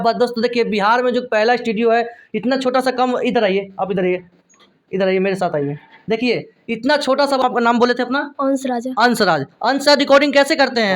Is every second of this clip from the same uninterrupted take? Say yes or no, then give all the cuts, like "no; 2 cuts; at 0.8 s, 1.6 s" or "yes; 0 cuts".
no; 1 cut; at 7.4 s